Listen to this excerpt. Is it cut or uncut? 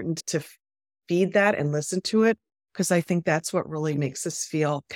uncut